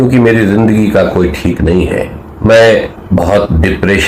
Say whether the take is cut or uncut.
cut